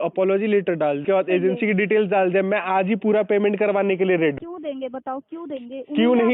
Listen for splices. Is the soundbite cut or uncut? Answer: cut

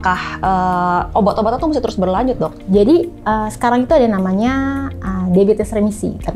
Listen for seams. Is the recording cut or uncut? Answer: uncut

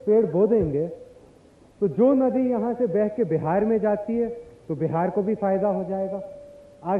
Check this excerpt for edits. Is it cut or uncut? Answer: uncut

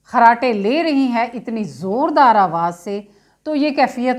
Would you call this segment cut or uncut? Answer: uncut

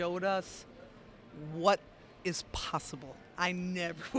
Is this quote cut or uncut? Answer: cut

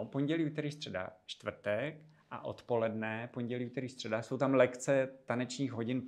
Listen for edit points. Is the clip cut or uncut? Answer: uncut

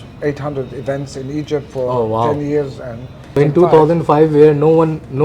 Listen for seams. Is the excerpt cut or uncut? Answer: cut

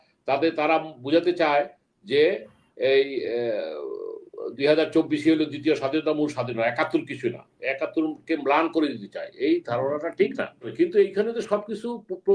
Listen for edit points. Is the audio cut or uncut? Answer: cut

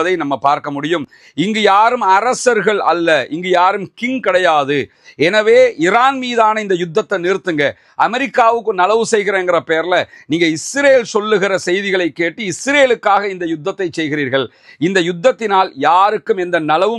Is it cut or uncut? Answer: uncut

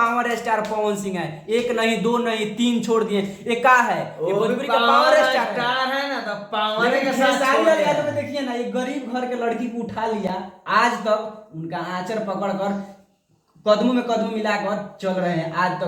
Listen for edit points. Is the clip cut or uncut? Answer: uncut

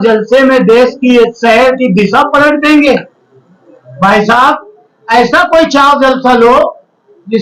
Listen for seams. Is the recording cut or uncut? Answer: uncut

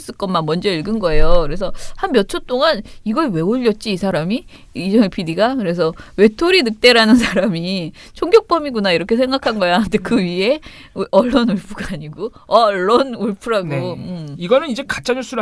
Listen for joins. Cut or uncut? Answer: cut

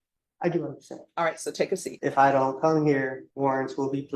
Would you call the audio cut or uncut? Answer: cut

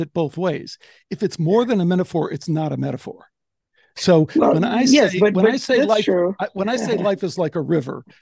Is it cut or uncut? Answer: uncut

